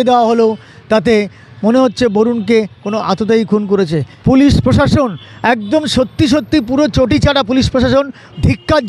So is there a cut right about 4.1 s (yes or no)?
yes